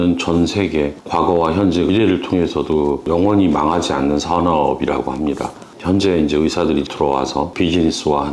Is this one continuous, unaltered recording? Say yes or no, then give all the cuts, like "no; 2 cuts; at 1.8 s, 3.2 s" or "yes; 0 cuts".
no; 1 cut; at 1.0 s